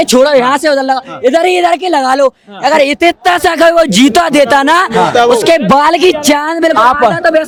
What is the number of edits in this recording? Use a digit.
0